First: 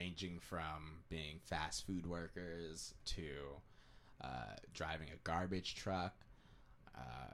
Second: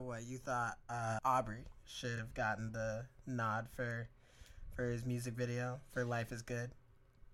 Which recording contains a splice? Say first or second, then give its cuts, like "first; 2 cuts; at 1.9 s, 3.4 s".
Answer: second; 1 cut; at 1.2 s